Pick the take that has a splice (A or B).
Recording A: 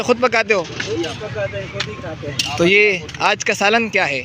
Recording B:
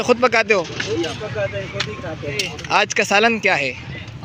B